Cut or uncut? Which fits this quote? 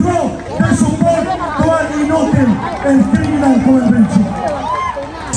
uncut